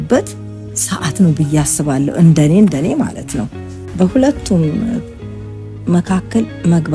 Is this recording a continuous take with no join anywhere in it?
no; 1 cut; at 3.8 s

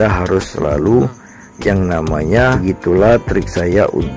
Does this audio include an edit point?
yes; 1 cut; at 2.6 s

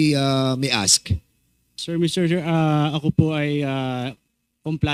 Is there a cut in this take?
no; 0 cuts

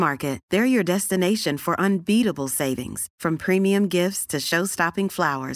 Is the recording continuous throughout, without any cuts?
yes; 0 cuts

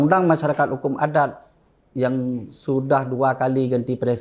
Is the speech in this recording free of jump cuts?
yes; 0 cuts

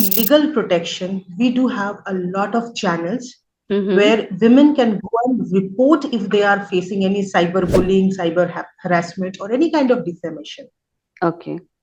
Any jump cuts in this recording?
no; 0 cuts

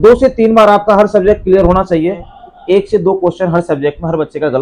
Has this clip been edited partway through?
yes; 1 cut; at 2.3 s

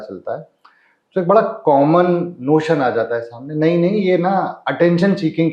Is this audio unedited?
yes; 0 cuts

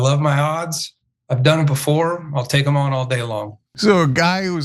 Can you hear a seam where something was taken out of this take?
yes; 1 cut; at 3.6 s

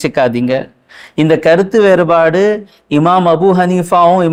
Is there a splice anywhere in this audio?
no; 0 cuts

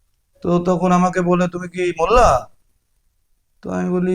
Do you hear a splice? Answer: no; 0 cuts

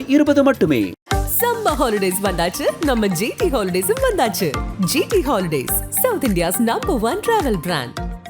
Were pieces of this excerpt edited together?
yes; 1 cut; at 1.0 s

